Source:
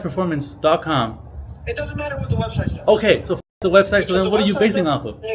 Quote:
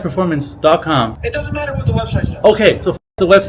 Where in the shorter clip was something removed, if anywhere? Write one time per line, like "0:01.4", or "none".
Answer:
0:01.2